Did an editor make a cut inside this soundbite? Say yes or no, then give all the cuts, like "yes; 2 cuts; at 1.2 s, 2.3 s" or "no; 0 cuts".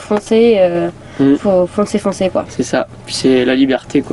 no; 0 cuts